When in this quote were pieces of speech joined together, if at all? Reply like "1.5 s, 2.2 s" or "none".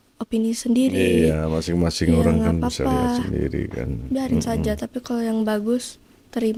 none

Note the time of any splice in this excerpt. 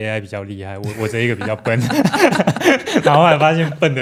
none

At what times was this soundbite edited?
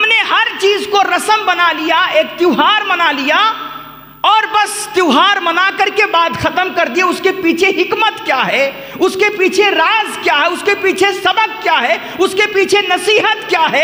none

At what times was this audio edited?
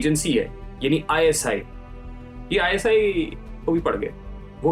none

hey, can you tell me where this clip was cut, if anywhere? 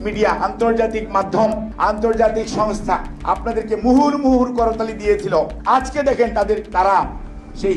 1.6 s, 3.1 s, 5.6 s

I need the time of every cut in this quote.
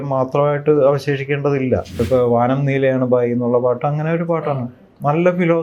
2.0 s

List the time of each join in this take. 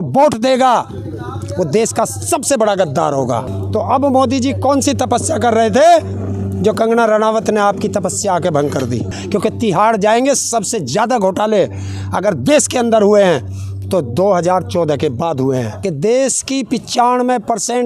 3.5 s, 9.2 s, 15.7 s

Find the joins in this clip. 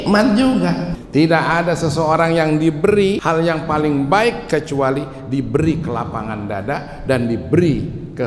0.9 s, 3.2 s

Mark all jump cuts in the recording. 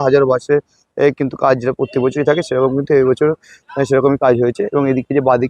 none

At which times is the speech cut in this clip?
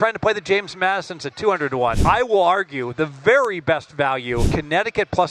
2.0 s, 4.5 s

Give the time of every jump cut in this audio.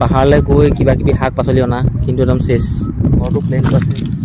3.3 s

